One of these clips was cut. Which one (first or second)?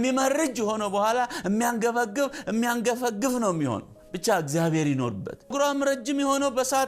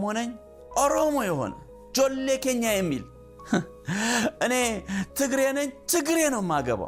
first